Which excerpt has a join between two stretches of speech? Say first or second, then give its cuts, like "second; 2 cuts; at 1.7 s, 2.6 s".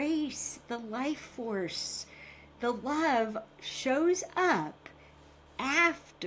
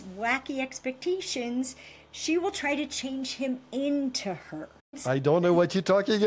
second; 1 cut; at 5.0 s